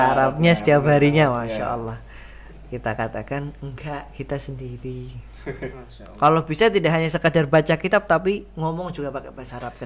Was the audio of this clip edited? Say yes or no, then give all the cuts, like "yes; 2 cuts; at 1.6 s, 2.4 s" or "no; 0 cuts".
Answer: yes; 1 cut; at 5.7 s